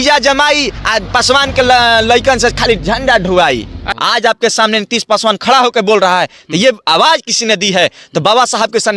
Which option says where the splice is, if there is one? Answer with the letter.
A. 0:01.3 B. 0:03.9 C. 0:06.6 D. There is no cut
B